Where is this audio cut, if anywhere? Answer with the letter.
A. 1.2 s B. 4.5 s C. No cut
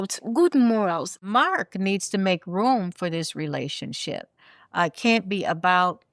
A